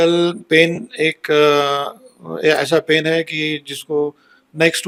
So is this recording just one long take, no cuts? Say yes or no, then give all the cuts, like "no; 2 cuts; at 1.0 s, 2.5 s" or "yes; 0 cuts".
yes; 0 cuts